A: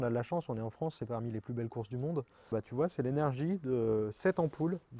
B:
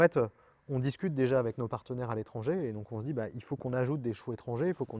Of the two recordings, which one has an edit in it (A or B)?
A